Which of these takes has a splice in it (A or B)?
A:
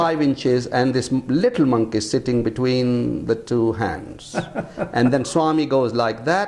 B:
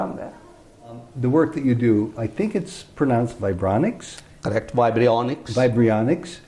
B